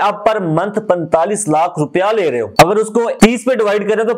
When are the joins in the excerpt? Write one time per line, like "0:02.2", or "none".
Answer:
none